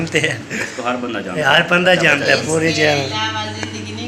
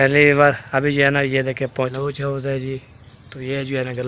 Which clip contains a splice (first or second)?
second